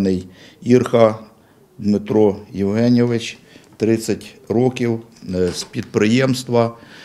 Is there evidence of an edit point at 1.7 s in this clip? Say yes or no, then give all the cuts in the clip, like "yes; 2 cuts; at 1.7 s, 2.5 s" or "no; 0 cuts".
no; 0 cuts